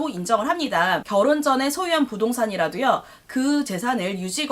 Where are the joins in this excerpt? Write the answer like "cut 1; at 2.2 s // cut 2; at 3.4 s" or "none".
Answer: cut 1; at 1.0 s

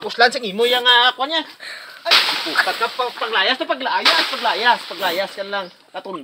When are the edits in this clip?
none

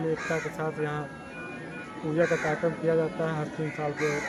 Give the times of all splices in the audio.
none

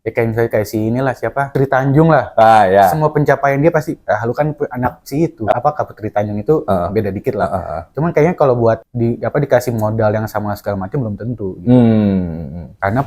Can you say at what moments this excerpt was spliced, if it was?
cut 1; at 1.5 s // cut 2; at 5.5 s

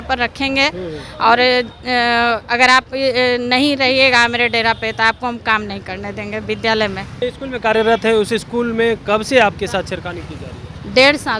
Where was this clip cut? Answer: cut 1; at 7.1 s

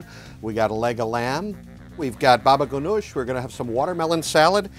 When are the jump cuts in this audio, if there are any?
cut 1; at 1.8 s // cut 2; at 3.2 s

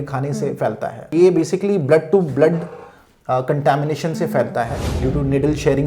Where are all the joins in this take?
cut 1; at 1.0 s // cut 2; at 4.8 s

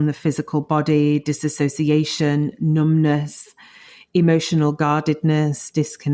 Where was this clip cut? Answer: none

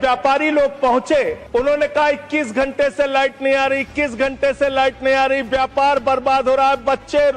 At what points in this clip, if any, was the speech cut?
cut 1; at 1.4 s

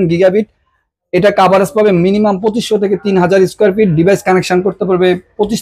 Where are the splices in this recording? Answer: none

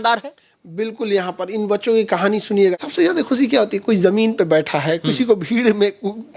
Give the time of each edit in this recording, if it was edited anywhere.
cut 1; at 2.8 s

